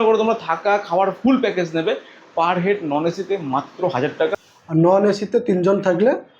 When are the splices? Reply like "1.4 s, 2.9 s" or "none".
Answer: 4.3 s